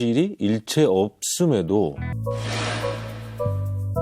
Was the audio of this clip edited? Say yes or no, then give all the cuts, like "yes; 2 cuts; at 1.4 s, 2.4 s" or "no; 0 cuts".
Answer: yes; 1 cut; at 2.1 s